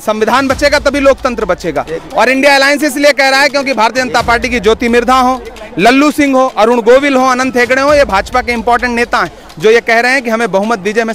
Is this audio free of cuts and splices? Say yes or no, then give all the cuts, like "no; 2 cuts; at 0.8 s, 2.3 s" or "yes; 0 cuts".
yes; 0 cuts